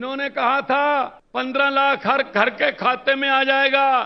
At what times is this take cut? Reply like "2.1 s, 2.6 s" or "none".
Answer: 1.2 s

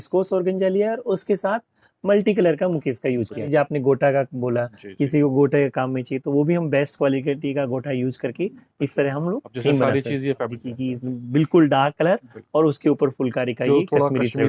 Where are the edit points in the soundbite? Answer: 3.5 s, 10.5 s

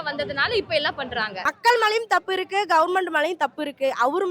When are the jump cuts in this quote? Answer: 1.5 s

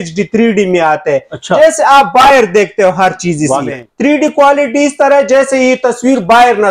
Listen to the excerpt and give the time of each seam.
3.8 s

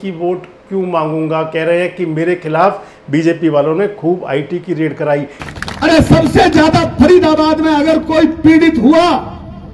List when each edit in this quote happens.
5.3 s

